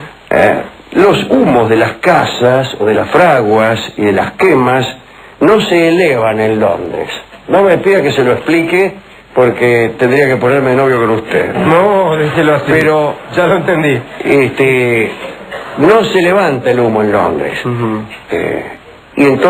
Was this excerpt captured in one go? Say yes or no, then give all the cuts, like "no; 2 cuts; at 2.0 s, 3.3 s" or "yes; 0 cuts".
no; 1 cut; at 16.1 s